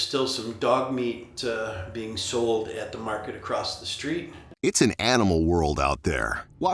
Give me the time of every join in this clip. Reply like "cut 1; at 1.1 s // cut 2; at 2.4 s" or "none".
cut 1; at 4.5 s